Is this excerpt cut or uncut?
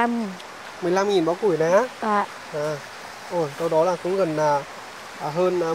uncut